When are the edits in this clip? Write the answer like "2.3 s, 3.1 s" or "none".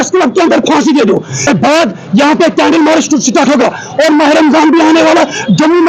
1.5 s